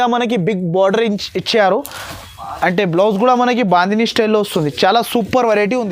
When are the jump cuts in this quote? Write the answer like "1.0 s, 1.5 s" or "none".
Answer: none